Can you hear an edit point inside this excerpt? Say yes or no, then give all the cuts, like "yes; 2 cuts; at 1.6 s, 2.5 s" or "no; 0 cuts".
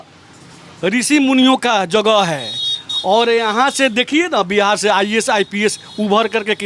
no; 0 cuts